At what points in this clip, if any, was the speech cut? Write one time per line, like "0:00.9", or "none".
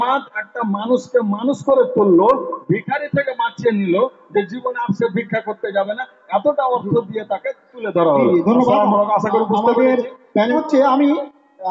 0:10.5